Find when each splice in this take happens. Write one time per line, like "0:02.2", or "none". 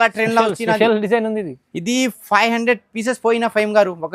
none